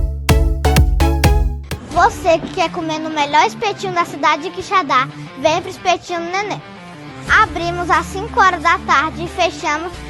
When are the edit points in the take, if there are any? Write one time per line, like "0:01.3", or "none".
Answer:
0:01.6